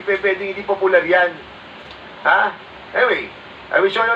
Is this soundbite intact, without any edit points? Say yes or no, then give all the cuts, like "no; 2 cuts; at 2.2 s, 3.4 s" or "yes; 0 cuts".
yes; 0 cuts